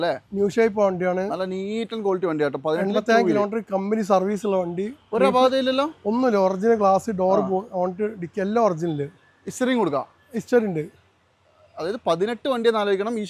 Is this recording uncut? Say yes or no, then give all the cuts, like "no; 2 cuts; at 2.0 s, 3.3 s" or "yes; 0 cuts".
yes; 0 cuts